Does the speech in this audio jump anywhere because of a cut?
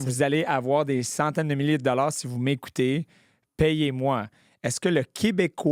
no; 0 cuts

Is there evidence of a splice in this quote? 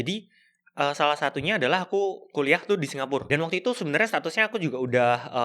yes; 1 cut; at 3.2 s

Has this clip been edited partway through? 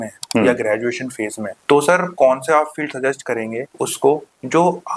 yes; 2 cuts; at 1.5 s, 3.7 s

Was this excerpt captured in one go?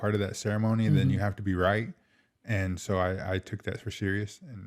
yes; 0 cuts

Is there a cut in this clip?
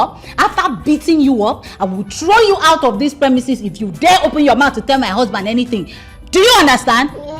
no; 0 cuts

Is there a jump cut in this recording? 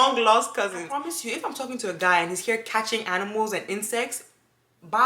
yes; 1 cut; at 0.9 s

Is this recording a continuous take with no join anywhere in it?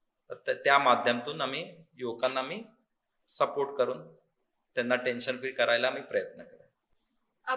yes; 0 cuts

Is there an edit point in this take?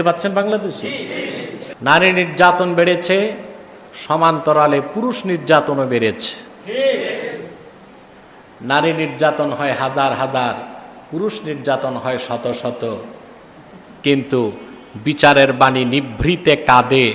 yes; 1 cut; at 1.6 s

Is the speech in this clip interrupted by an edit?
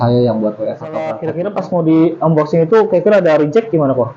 yes; 1 cut; at 1.2 s

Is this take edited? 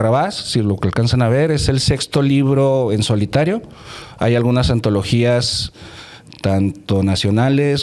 no; 0 cuts

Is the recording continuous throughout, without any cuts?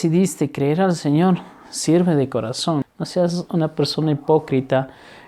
no; 1 cut; at 2.8 s

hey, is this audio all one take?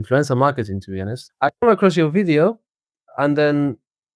yes; 0 cuts

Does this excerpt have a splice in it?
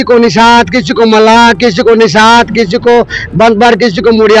no; 0 cuts

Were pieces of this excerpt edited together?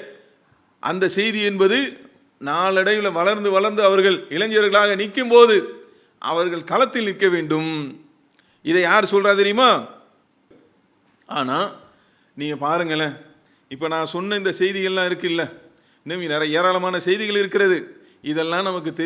yes; 1 cut; at 10.5 s

